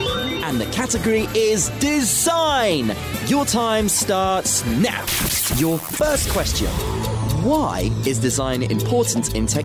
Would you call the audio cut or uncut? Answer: uncut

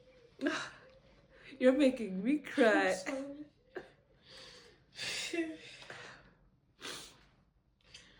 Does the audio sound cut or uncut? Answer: uncut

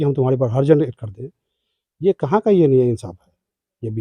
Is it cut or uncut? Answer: uncut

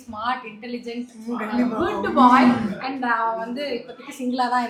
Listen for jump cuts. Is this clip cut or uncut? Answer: uncut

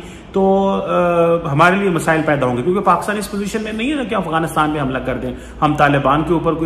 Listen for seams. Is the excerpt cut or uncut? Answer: uncut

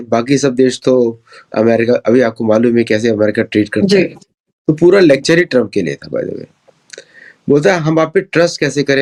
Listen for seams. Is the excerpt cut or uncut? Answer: uncut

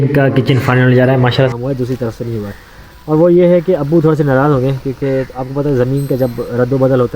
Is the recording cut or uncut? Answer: cut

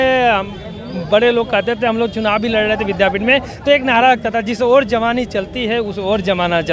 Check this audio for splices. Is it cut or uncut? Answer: uncut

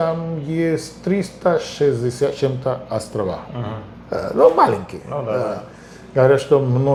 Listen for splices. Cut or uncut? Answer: uncut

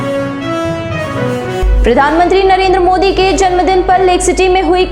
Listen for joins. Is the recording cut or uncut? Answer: cut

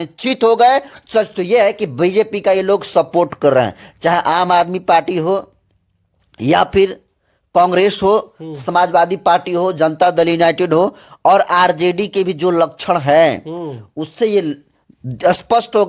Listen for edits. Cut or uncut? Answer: uncut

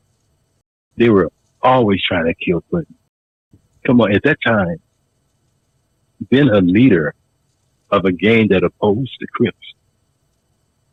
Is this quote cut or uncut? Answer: uncut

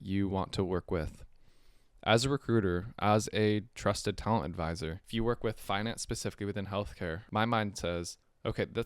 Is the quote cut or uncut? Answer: cut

